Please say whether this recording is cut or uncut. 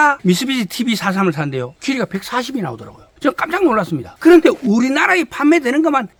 uncut